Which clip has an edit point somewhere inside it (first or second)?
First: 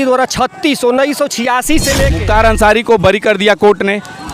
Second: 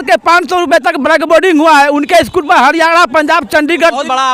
first